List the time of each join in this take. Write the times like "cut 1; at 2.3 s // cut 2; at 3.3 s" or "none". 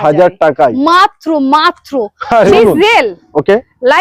cut 1; at 2.5 s